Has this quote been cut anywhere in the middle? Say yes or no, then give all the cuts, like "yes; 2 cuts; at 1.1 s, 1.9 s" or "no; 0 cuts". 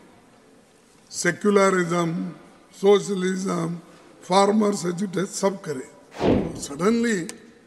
yes; 1 cut; at 6.3 s